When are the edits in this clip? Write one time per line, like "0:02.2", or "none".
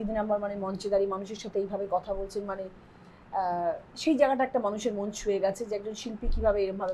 none